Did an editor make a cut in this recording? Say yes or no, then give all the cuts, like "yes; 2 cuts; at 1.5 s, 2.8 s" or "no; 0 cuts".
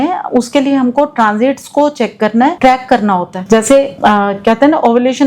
yes; 2 cuts; at 2.6 s, 3.8 s